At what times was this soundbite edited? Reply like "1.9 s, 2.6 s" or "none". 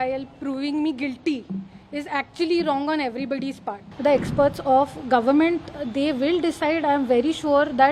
3.8 s